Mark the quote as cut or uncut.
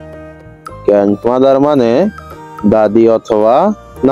uncut